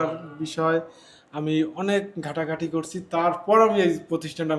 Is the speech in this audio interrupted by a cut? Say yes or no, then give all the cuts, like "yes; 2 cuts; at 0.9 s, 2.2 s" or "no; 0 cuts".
no; 0 cuts